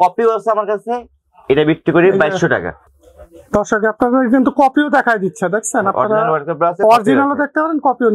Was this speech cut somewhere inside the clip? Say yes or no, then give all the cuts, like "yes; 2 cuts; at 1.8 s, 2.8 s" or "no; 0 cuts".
no; 0 cuts